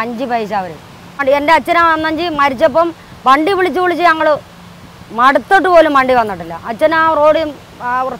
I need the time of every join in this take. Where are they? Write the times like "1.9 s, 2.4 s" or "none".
1.2 s

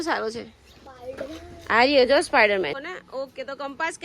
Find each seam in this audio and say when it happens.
2.7 s

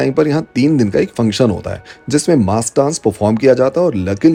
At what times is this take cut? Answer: none

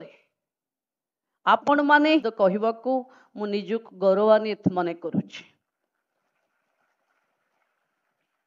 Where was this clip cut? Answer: 2.3 s

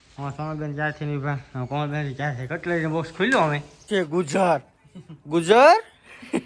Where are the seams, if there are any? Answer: 3.9 s

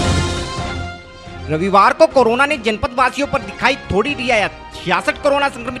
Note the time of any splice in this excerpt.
1.1 s

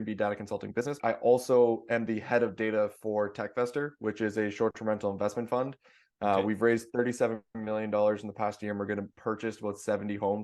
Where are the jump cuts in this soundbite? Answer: 1.0 s, 9.1 s

